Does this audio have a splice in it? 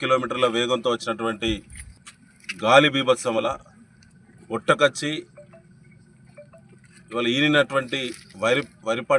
yes; 1 cut; at 3.5 s

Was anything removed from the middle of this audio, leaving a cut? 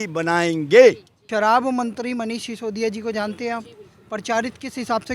yes; 1 cut; at 1.1 s

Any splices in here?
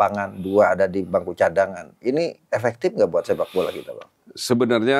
no; 0 cuts

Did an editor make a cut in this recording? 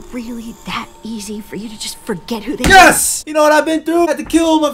yes; 1 cut; at 3.6 s

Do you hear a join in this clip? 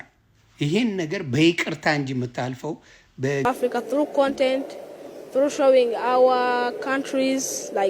yes; 1 cut; at 3.4 s

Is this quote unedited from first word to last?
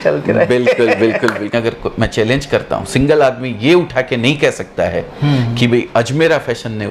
no; 1 cut; at 1.5 s

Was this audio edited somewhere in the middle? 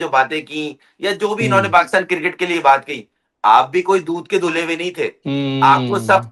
no; 0 cuts

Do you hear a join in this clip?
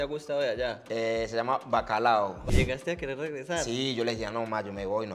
yes; 1 cut; at 2.5 s

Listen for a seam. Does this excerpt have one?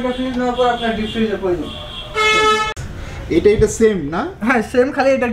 yes; 1 cut; at 2.7 s

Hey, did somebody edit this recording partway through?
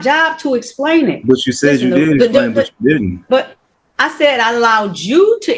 no; 0 cuts

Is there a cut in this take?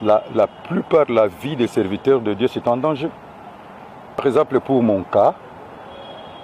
yes; 1 cut; at 4.2 s

